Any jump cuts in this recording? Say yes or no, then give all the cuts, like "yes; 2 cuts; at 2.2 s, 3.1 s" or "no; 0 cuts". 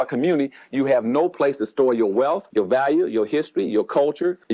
no; 0 cuts